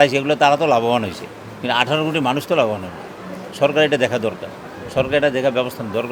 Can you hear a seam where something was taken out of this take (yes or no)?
no